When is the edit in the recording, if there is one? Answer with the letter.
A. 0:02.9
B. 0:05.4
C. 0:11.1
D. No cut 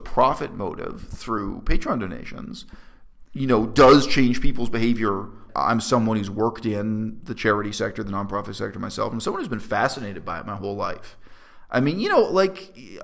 B